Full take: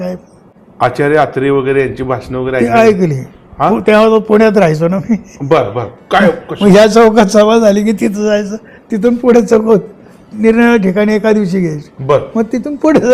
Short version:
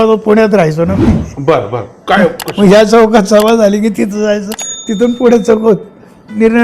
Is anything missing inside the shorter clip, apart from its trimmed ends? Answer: no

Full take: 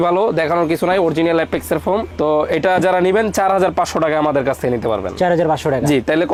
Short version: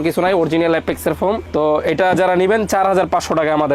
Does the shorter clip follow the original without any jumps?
yes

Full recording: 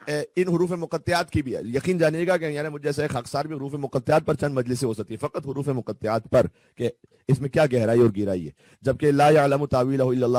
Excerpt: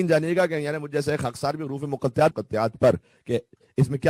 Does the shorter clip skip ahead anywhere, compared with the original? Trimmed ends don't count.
yes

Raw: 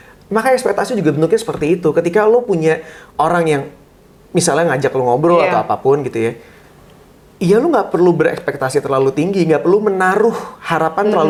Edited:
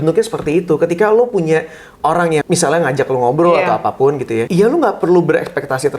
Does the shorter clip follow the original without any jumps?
no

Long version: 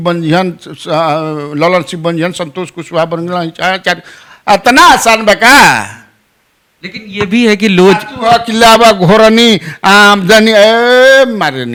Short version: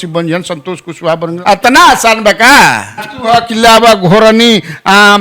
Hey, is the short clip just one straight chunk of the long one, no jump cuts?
no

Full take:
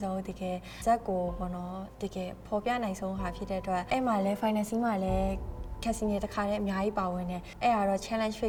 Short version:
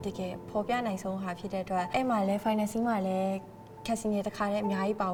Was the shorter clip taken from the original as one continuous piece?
yes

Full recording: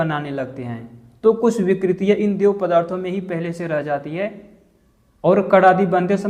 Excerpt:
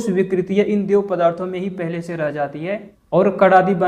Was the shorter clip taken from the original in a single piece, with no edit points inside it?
no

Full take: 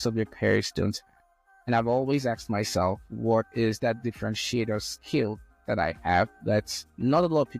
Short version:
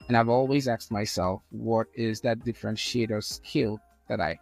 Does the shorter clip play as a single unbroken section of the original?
yes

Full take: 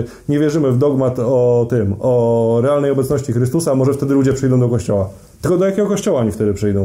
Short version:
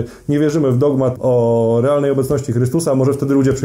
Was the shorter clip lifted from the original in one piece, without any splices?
no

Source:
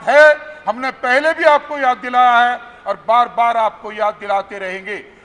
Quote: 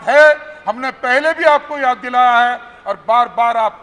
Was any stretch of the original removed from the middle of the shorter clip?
no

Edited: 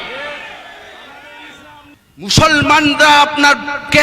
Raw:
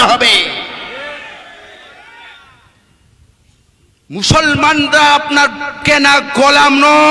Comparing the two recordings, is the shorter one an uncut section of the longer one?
no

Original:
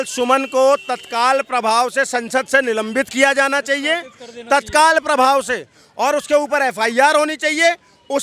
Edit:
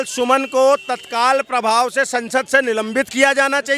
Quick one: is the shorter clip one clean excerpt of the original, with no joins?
yes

